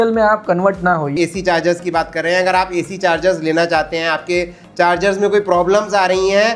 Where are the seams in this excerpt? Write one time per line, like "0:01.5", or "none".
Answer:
0:01.1